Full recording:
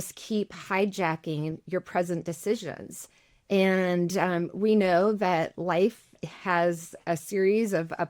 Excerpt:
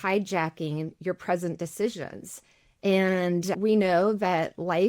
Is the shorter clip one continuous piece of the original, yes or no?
no